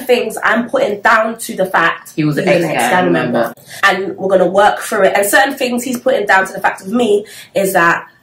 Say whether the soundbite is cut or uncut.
uncut